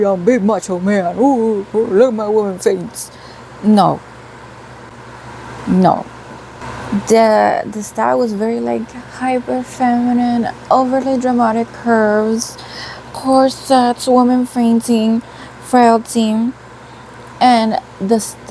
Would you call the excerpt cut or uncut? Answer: uncut